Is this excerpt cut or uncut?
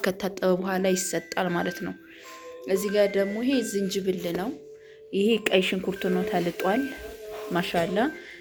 uncut